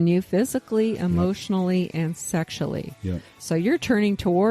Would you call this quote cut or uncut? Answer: cut